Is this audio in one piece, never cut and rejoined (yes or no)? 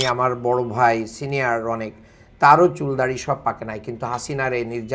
yes